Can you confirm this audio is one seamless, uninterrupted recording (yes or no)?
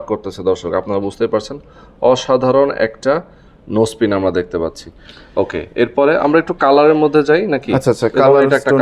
yes